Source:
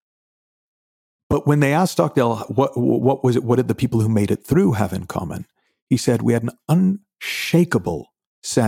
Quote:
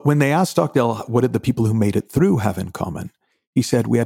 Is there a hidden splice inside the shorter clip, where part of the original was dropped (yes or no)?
yes